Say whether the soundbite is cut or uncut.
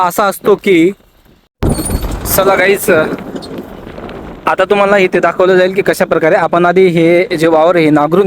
cut